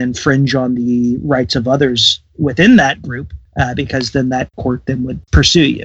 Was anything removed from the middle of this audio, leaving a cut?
yes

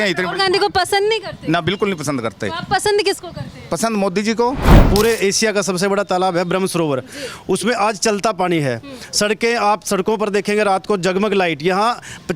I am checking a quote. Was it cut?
yes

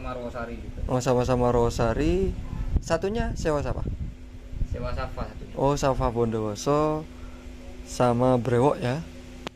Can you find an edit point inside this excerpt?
no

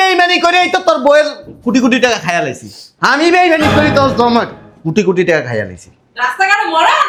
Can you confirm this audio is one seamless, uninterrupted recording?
yes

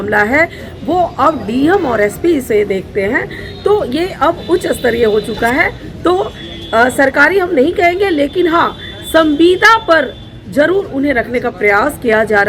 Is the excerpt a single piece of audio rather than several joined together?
yes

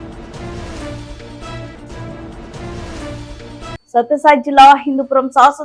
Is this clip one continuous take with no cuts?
yes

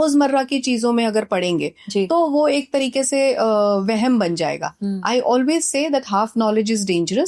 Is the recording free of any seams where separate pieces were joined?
yes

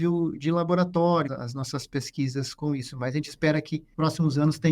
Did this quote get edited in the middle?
yes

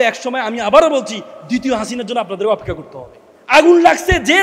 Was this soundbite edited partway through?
yes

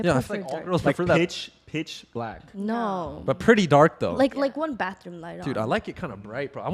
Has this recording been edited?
no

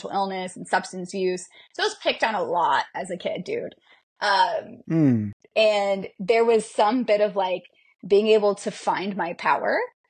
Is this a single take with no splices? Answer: yes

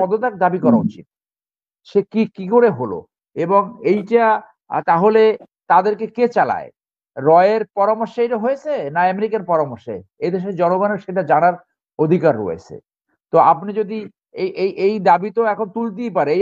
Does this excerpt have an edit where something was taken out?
no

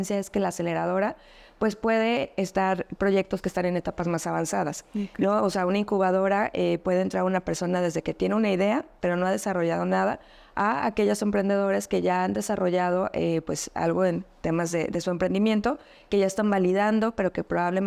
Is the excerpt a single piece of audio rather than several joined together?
yes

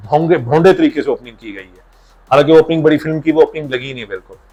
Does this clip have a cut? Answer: no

